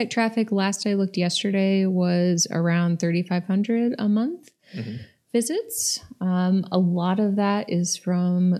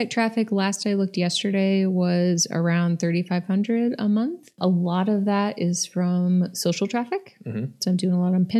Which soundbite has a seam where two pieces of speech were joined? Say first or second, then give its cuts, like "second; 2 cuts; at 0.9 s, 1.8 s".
second; 1 cut; at 4.6 s